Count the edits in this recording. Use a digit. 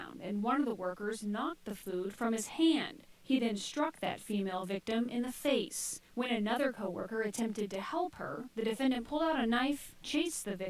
3